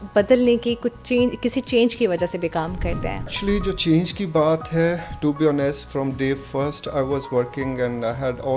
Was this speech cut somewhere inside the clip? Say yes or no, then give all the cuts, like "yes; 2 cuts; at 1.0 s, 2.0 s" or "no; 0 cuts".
yes; 1 cut; at 3.3 s